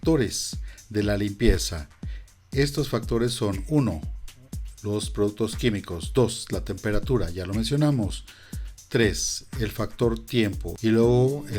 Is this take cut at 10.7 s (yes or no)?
yes